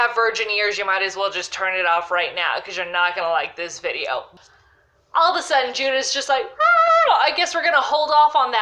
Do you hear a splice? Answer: yes; 1 cut; at 4.3 s

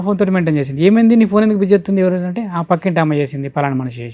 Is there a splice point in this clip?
no; 0 cuts

